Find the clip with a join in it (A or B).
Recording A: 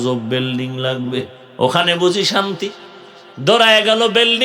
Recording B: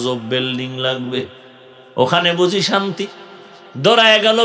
A